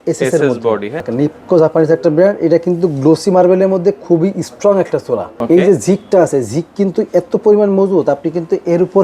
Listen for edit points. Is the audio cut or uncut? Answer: cut